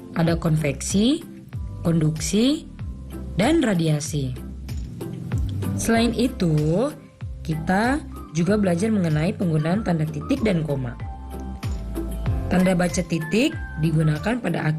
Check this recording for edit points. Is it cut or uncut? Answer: cut